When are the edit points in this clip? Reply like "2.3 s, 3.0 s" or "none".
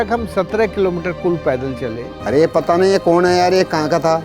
2.1 s

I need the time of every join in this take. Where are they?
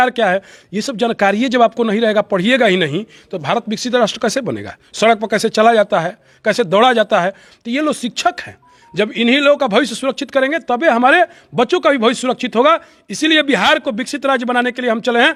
none

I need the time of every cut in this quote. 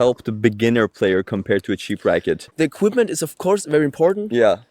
2.5 s

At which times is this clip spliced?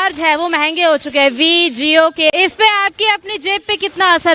2.3 s

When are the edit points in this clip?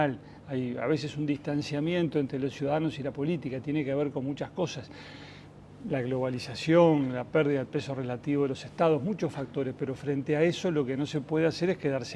8.3 s

